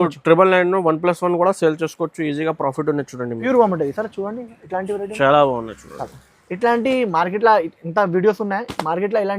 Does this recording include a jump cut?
yes; 1 cut; at 3.4 s

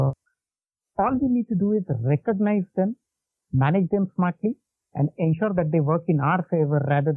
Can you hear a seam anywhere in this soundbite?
no; 0 cuts

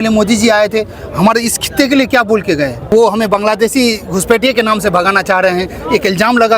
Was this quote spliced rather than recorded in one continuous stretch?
yes; 1 cut; at 2.8 s

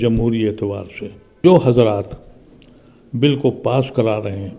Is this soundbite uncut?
no; 1 cut; at 1.4 s

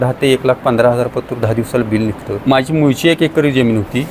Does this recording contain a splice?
yes; 1 cut; at 2.3 s

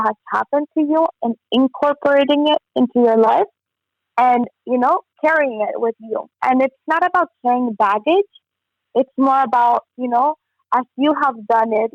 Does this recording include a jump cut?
no; 0 cuts

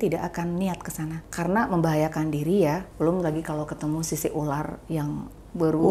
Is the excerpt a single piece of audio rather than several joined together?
no; 2 cuts; at 1.2 s, 2.9 s

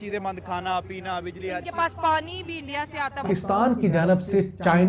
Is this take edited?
yes; 1 cut; at 3.2 s

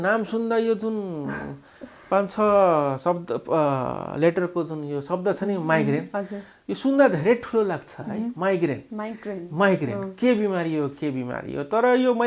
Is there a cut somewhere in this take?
no; 0 cuts

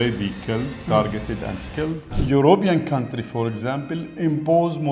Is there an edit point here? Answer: yes; 1 cut; at 2.1 s

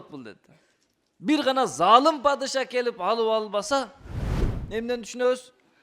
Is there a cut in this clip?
yes; 1 cut; at 4.5 s

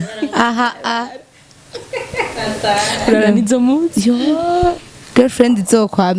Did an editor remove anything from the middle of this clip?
no; 0 cuts

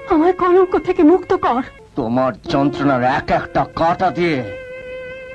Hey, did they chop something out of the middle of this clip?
yes; 1 cut; at 1.8 s

